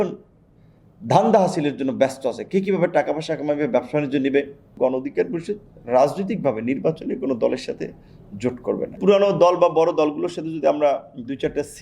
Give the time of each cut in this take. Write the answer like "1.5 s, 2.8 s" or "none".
4.6 s, 9.0 s